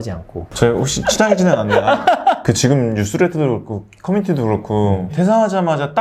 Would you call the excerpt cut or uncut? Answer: uncut